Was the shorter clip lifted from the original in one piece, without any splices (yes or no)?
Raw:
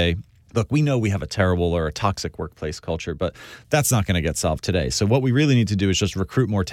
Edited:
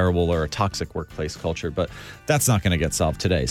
yes